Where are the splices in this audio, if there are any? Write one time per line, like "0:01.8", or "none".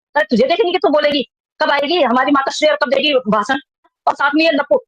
0:04.0